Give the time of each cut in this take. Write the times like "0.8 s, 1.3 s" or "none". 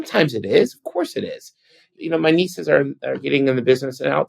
1.9 s